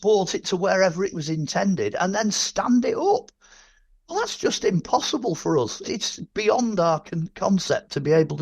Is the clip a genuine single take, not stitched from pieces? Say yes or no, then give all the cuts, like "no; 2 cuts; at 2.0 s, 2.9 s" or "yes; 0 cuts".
no; 1 cut; at 5.8 s